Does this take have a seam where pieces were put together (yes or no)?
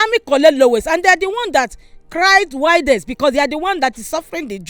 no